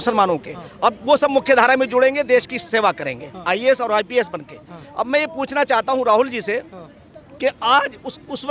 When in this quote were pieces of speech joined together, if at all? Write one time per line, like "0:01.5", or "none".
none